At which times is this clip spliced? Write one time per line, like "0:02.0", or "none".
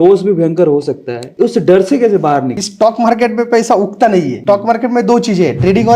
0:02.6
0:04.3